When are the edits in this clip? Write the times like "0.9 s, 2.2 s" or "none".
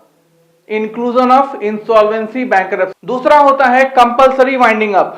3.0 s

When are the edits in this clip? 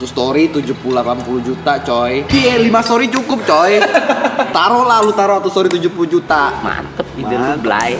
2.3 s, 4.5 s, 6.6 s

